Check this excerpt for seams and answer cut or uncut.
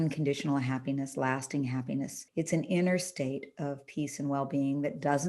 cut